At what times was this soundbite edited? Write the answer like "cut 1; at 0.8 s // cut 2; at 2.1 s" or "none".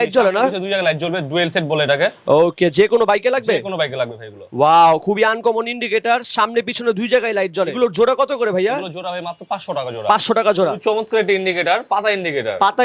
none